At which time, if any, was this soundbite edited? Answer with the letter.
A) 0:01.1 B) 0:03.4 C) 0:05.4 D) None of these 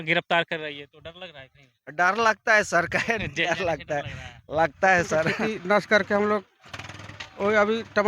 C